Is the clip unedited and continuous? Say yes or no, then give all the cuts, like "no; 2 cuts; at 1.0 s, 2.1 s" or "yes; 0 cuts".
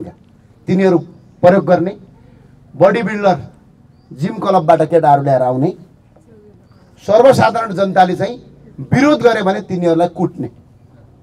yes; 0 cuts